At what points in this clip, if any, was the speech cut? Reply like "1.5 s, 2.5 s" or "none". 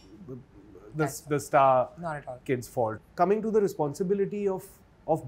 3.0 s